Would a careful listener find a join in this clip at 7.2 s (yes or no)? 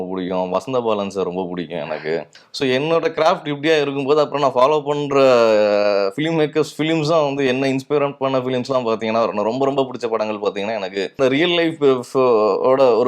no